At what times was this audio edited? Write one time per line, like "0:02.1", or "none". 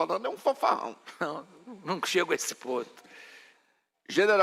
none